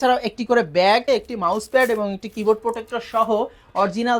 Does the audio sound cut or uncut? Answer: cut